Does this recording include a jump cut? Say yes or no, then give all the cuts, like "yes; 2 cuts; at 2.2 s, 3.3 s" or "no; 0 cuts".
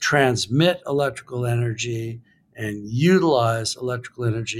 no; 0 cuts